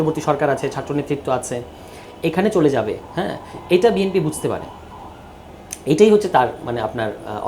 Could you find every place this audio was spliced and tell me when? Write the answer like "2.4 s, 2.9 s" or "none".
none